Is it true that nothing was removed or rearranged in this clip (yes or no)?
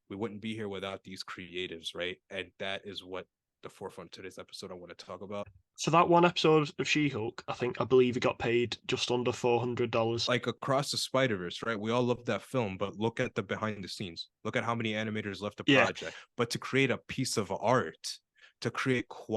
no